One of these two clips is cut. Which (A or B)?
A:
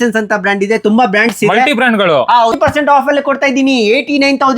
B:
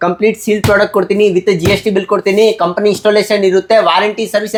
A